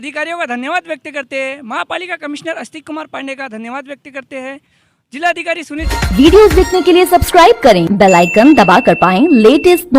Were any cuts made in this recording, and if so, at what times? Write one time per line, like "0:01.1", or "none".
0:05.9

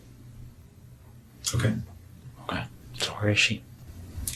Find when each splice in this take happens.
none

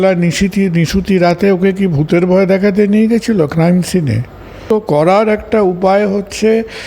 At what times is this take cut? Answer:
0:04.6

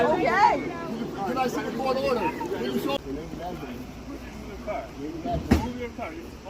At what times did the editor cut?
0:03.0

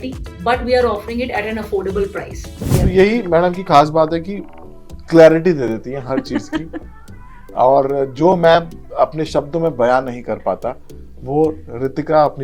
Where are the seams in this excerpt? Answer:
0:02.7

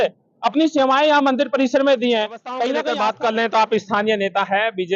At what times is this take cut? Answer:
0:02.8

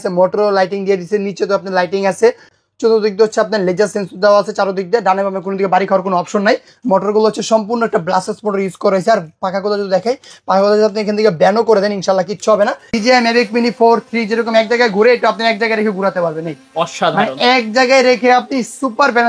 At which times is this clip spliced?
0:02.5
0:12.9

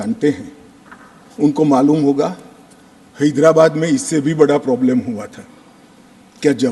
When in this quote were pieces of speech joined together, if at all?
none

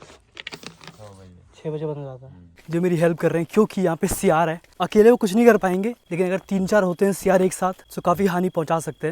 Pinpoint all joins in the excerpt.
0:02.5

